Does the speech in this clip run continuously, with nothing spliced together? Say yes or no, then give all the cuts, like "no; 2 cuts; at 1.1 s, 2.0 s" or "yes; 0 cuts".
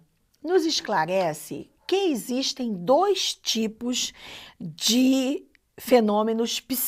yes; 0 cuts